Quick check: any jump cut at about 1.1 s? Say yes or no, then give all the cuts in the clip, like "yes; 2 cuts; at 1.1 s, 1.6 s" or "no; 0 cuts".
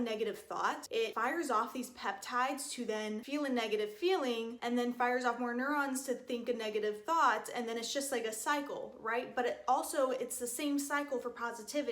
yes; 2 cuts; at 1.1 s, 3.2 s